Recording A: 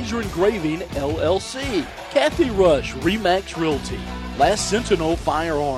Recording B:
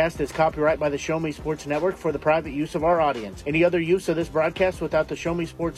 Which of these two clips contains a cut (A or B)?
A